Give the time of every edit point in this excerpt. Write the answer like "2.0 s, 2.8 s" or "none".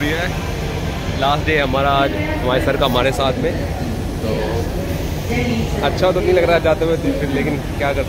none